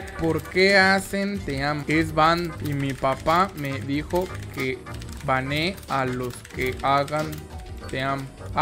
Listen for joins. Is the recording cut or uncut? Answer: uncut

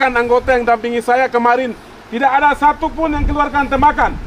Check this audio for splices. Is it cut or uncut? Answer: uncut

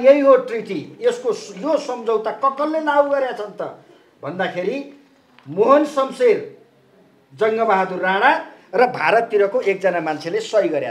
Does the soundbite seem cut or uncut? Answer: uncut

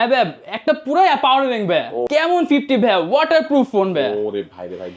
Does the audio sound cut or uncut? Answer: cut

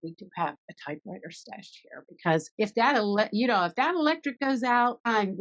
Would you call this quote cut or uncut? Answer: uncut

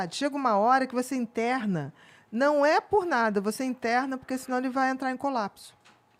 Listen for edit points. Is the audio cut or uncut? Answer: uncut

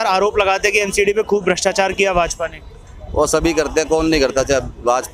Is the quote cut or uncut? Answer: uncut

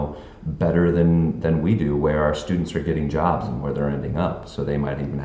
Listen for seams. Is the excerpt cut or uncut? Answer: uncut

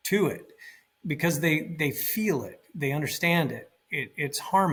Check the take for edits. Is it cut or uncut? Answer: uncut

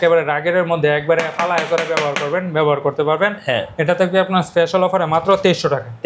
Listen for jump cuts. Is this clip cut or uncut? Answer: uncut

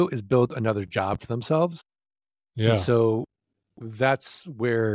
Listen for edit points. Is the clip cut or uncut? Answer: uncut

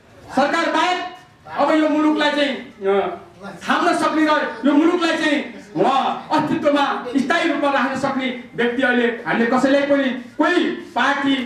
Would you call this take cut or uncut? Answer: uncut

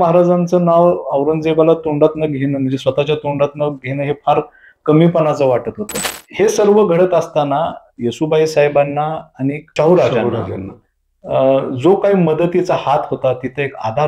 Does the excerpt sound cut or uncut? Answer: cut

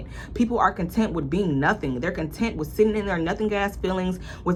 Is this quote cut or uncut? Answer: uncut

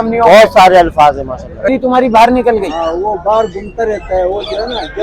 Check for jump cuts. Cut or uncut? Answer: cut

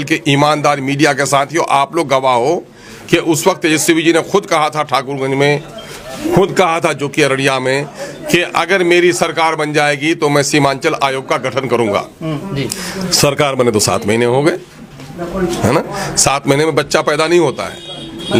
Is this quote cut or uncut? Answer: uncut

